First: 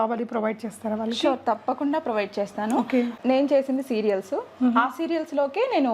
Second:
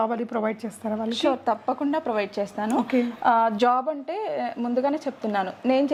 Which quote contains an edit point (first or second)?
first